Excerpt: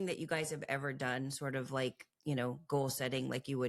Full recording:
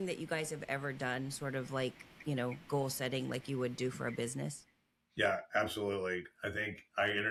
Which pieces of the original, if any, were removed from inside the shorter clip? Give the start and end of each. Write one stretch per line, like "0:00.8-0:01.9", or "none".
none